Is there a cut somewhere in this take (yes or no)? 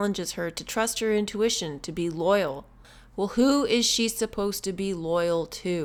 no